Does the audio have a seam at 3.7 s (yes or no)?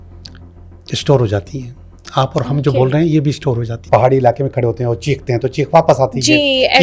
yes